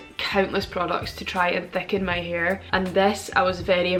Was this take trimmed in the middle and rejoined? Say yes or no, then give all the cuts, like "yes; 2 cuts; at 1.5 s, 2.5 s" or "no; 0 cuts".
no; 0 cuts